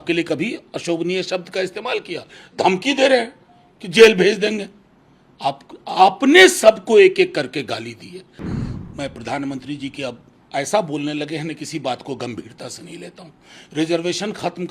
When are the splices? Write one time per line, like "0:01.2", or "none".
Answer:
0:08.6

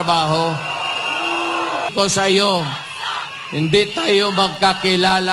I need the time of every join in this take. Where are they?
0:01.9

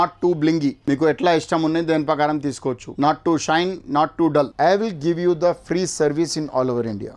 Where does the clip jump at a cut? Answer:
0:00.8
0:02.9
0:04.5

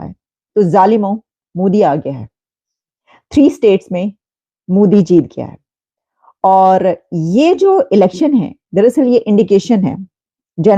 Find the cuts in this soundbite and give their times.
none

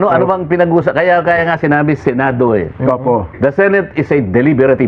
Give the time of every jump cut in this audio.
none

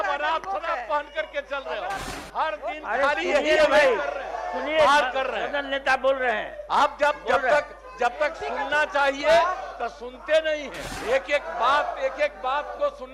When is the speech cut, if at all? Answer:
0:02.1
0:10.9

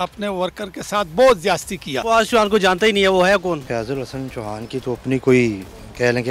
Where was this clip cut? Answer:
0:02.0
0:03.6

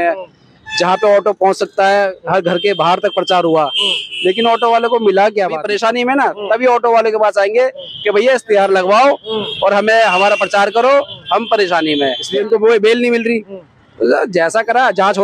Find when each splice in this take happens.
0:05.6
0:12.2

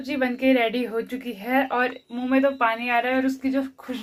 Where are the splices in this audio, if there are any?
none

